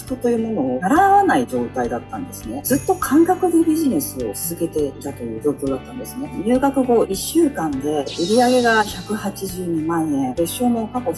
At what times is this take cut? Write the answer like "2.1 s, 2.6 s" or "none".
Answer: 6.3 s, 8.0 s

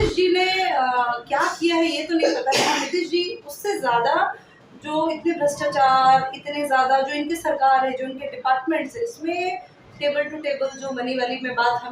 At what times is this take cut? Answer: none

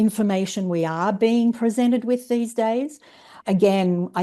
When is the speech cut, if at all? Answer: 3.3 s

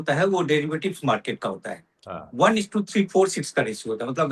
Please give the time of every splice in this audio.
none

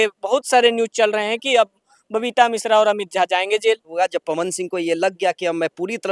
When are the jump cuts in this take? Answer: 3.9 s

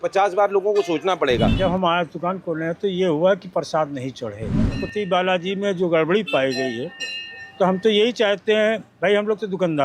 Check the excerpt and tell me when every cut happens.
1.5 s, 4.7 s

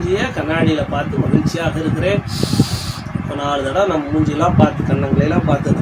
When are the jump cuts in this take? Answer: none

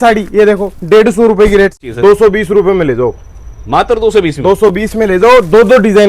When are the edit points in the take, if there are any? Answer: 1.8 s

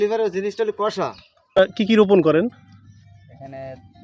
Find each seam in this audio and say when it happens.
1.7 s

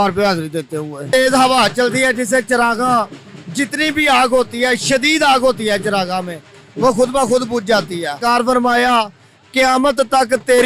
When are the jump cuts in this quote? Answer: 1.0 s, 8.2 s

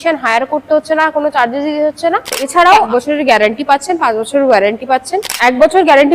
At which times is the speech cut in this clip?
2.7 s, 5.2 s

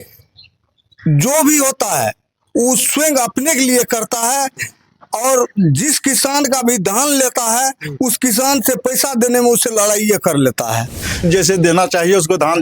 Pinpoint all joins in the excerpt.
11.2 s

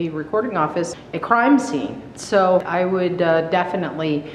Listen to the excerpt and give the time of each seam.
0.9 s, 2.7 s

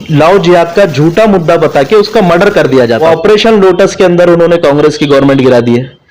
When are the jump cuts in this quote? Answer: 3.0 s

